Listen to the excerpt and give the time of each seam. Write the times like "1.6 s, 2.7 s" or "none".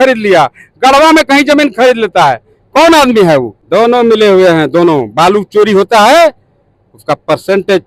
3.6 s